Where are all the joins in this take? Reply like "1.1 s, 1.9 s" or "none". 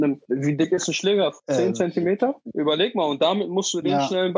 none

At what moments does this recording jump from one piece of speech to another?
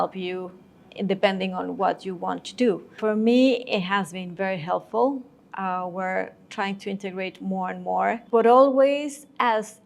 3.0 s, 8.2 s

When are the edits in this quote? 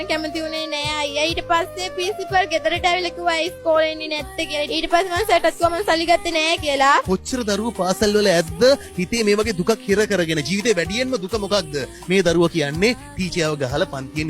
7.1 s

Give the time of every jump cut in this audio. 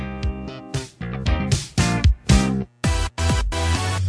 2.7 s

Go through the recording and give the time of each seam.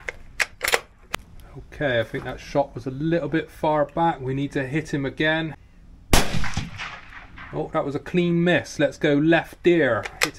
1.0 s, 5.6 s

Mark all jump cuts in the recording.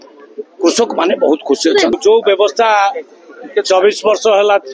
1.9 s

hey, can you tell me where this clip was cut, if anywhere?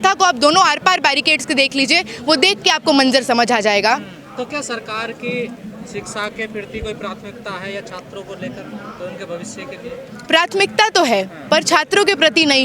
none

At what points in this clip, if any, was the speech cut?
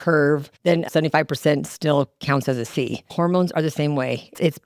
0.9 s, 3.0 s

